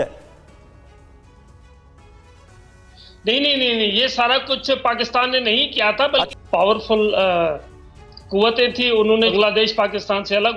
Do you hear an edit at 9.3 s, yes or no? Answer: yes